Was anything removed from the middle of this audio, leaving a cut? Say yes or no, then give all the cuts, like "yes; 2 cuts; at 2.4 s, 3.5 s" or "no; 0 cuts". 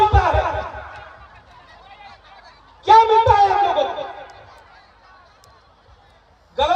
yes; 1 cut; at 2.7 s